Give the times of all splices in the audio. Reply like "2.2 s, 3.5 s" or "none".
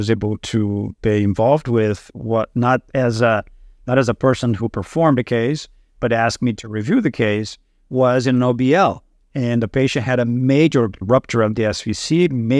none